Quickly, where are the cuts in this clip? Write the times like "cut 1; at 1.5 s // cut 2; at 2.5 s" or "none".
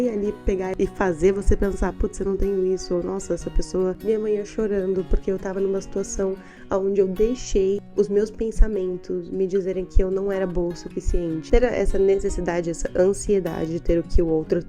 cut 1; at 3.9 s // cut 2; at 11.5 s